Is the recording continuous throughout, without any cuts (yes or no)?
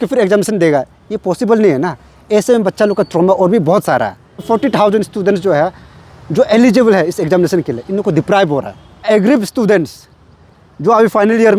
no